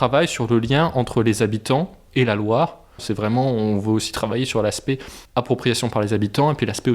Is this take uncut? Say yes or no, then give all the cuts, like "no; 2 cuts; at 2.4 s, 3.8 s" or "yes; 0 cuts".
no; 2 cuts; at 2.0 s, 3.0 s